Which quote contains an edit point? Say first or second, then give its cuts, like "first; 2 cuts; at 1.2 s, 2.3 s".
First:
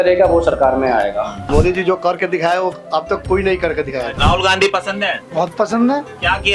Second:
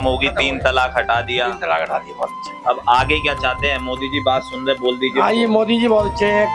first; 2 cuts; at 1.4 s, 4.1 s